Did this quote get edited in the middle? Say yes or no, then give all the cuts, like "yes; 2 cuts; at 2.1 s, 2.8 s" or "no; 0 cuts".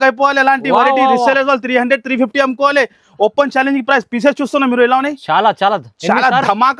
no; 0 cuts